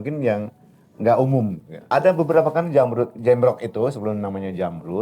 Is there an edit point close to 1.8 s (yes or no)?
yes